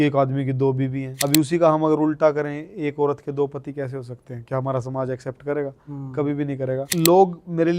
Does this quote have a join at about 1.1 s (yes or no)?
yes